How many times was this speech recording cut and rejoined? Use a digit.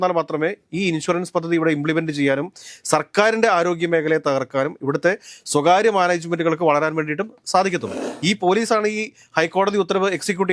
1